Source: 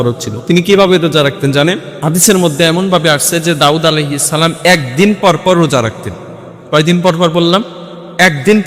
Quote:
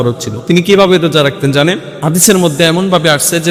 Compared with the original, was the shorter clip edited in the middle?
no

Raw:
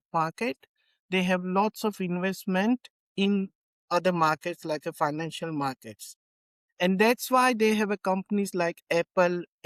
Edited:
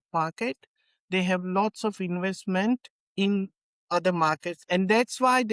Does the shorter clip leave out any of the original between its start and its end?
yes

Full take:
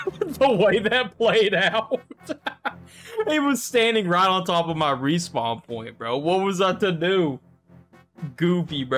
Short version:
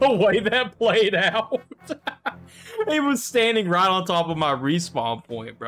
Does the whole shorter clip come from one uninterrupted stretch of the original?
yes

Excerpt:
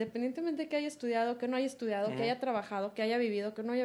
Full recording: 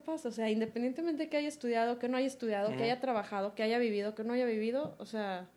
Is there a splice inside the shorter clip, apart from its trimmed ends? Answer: no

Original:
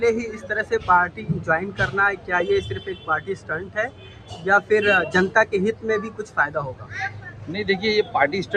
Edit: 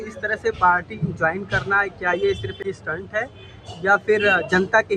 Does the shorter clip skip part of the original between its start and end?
yes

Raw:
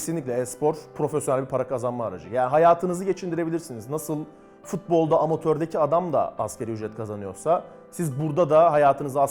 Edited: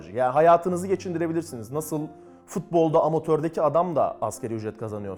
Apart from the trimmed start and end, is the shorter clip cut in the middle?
no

